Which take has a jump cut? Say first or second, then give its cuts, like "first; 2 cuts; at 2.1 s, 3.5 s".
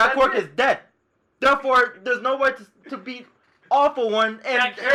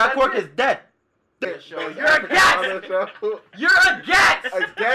second; 1 cut; at 1.4 s